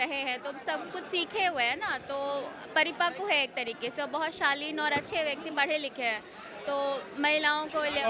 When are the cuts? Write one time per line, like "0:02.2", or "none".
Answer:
none